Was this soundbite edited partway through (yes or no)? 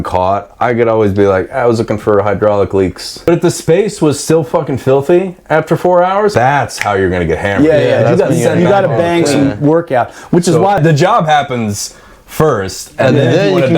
yes